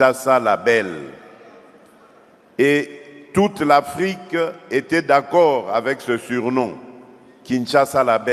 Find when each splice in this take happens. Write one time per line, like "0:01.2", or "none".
none

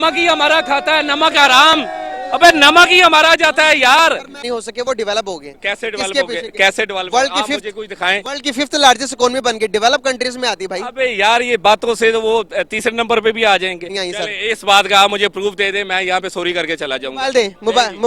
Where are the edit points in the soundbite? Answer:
0:04.4
0:14.0

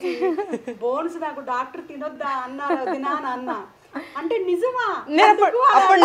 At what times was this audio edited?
0:02.1

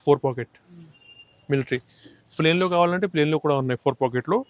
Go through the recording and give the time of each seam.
none

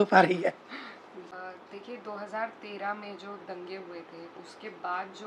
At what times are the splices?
0:01.3

